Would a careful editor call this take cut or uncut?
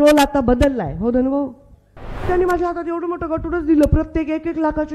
cut